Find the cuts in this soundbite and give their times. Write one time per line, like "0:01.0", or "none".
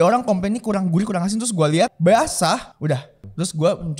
0:01.9
0:03.0